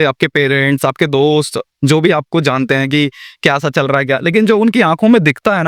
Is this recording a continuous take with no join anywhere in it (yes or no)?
yes